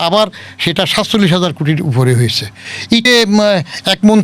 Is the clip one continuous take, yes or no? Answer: no